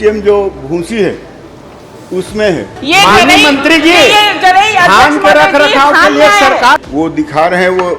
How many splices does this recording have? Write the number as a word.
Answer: two